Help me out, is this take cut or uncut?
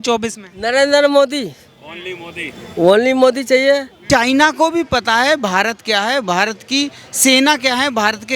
cut